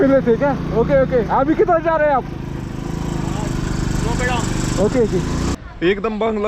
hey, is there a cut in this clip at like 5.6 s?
yes; 1 cut; at 5.6 s

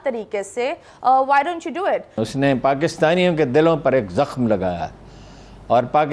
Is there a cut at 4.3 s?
no; 1 cut; at 2.2 s

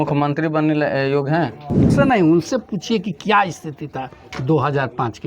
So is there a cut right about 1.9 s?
yes; 1 cut; at 1.9 s

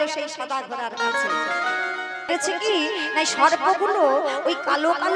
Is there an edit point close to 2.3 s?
yes; 1 cut; at 2.3 s

